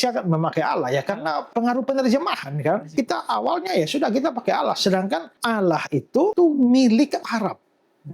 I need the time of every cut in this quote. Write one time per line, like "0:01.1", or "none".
0:01.5
0:02.9
0:05.3
0:06.3